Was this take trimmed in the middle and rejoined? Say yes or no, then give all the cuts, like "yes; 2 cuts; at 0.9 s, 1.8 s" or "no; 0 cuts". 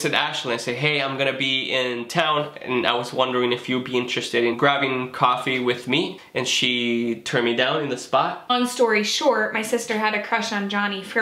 yes; 3 cuts; at 4.6 s, 6.2 s, 8.5 s